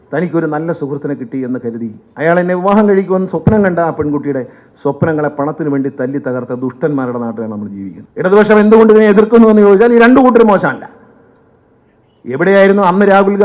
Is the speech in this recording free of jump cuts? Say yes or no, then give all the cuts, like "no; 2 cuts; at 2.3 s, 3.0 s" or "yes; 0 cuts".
no; 1 cut; at 8.0 s